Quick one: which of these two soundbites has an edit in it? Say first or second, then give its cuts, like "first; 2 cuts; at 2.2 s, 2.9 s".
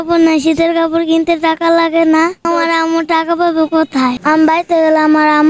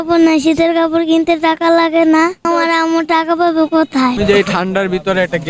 first; 1 cut; at 4.2 s